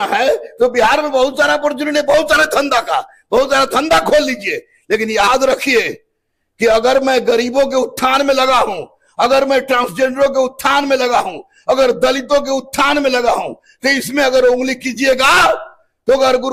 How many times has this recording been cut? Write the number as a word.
zero